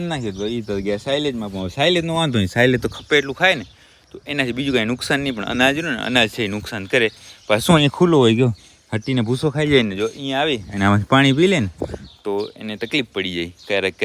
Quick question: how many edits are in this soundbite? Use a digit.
0